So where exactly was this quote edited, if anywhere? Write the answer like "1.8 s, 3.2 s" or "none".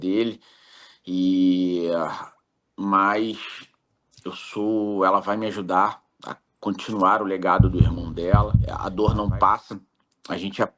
8.6 s